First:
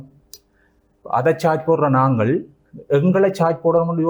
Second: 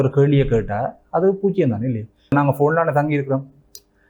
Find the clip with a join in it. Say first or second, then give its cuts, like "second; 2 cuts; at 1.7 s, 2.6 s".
second; 1 cut; at 2.3 s